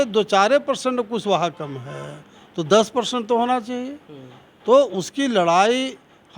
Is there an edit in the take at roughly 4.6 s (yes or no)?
no